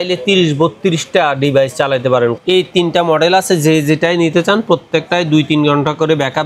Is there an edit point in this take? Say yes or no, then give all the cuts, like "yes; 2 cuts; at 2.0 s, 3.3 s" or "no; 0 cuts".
yes; 1 cut; at 2.4 s